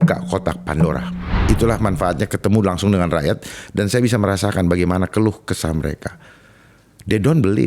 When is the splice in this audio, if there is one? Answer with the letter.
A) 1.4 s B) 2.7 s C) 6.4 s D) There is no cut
A